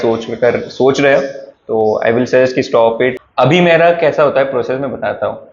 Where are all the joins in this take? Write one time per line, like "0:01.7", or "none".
0:03.1